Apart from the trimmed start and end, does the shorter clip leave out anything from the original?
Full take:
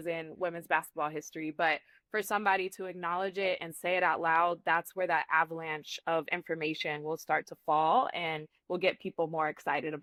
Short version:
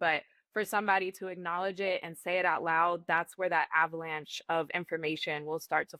no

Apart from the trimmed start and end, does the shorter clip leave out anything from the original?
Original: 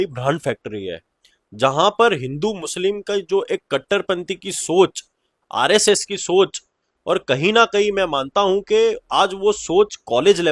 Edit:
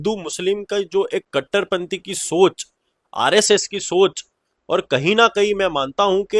no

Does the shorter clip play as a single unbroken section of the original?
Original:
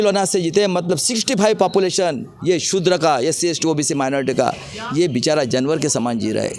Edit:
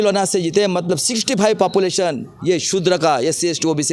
yes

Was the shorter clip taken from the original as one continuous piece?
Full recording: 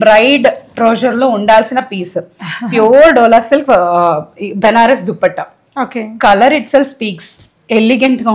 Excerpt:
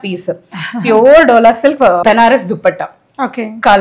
no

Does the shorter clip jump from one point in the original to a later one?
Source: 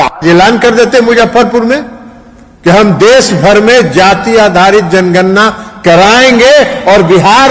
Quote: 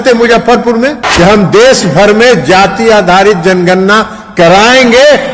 yes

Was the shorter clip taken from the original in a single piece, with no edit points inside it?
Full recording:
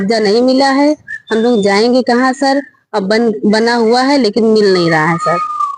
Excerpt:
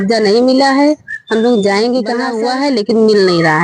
no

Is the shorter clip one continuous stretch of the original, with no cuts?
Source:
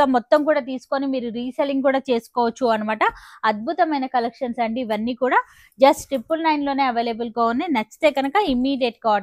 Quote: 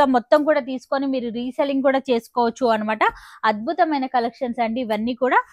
yes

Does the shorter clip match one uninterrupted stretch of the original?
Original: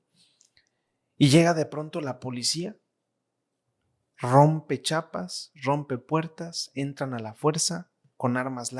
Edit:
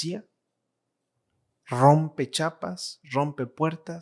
yes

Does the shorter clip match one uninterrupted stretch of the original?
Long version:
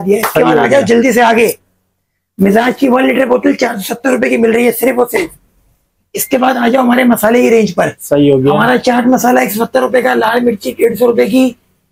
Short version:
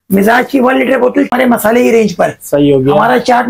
no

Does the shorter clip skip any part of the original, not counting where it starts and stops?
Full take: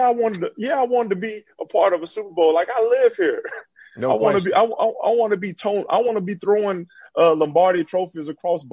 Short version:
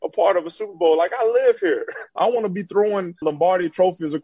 yes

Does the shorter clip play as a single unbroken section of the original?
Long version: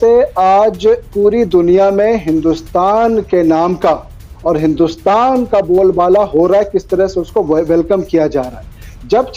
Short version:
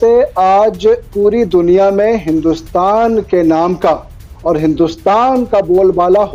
yes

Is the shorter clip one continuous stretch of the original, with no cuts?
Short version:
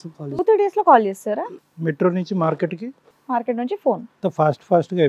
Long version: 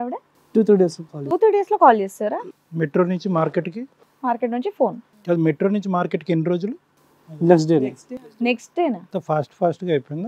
no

